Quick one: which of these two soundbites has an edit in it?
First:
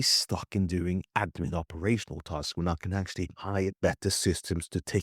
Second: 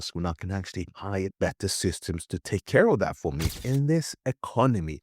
second; 1 cut; at 3.5 s

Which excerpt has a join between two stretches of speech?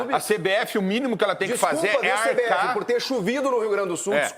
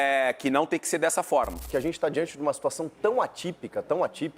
second; 1 cut; at 1.6 s

